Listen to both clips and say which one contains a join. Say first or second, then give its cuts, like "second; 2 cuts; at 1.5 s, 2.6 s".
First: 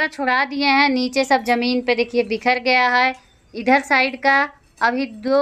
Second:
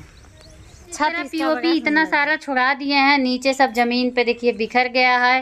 second; 1 cut; at 1.2 s